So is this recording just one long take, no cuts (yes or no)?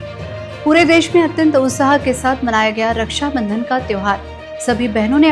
yes